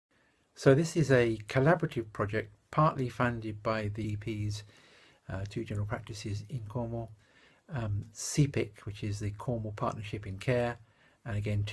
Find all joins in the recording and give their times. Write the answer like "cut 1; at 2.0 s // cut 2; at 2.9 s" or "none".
none